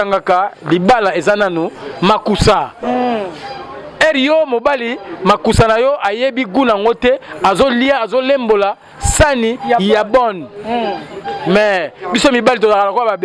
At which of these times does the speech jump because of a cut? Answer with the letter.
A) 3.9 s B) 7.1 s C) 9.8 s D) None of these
D